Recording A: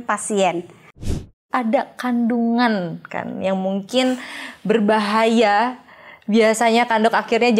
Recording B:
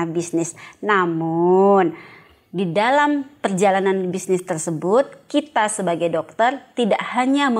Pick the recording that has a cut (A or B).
A